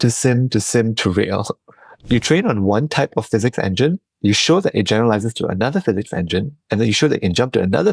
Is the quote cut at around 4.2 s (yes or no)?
no